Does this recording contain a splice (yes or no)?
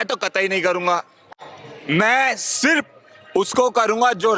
no